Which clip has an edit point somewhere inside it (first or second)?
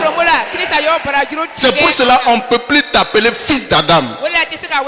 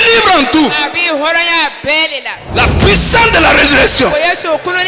second